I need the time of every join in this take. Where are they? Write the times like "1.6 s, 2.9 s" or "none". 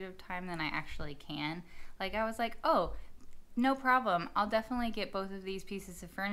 none